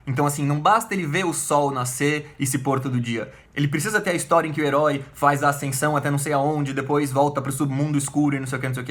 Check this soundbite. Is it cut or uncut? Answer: uncut